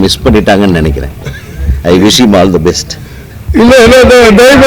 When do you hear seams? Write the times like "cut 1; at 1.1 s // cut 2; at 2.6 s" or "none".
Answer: cut 1; at 3.4 s